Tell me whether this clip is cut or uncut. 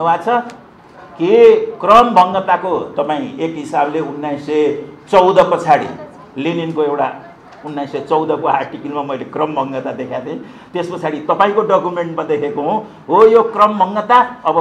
uncut